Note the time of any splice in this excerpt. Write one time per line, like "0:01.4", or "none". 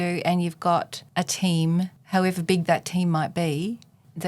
0:01.0
0:02.0

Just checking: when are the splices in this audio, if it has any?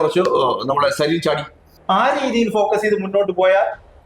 0:01.7

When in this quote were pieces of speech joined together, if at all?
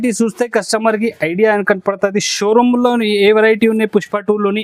none

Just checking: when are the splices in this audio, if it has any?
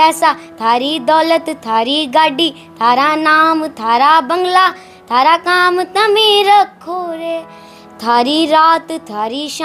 none

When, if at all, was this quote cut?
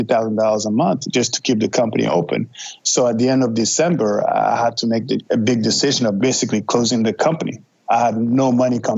0:06.2

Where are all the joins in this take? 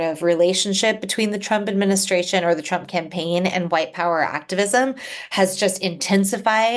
none

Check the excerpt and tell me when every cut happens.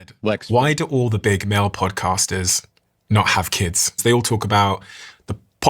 0:04.0

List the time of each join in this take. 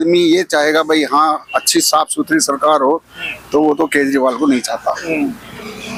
none

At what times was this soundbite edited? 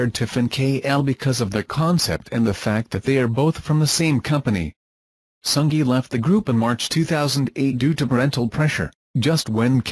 none

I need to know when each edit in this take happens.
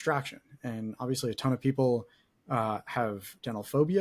none

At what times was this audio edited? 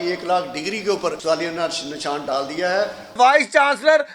0:01.2
0:03.2

